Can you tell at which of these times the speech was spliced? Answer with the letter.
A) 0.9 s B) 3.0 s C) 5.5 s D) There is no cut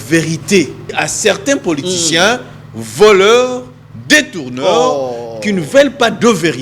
A